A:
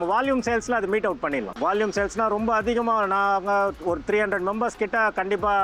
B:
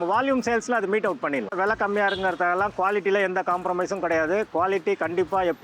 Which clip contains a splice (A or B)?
B